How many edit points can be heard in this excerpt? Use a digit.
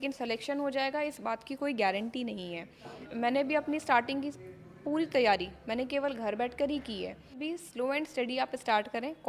2